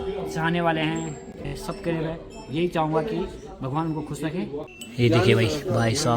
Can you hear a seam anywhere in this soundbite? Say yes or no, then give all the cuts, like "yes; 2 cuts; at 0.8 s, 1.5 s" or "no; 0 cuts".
yes; 2 cuts; at 1.5 s, 4.8 s